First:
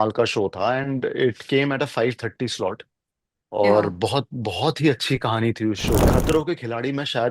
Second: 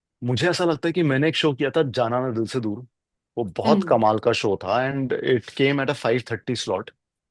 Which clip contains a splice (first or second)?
first